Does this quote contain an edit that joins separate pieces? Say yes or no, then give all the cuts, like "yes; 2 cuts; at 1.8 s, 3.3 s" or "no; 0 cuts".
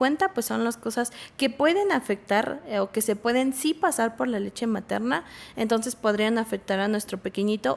no; 0 cuts